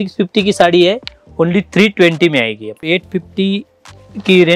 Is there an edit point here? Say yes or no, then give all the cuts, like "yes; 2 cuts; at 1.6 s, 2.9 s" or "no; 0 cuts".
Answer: yes; 1 cut; at 2.8 s